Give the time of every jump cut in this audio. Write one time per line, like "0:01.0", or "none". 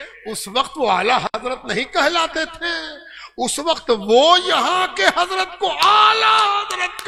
none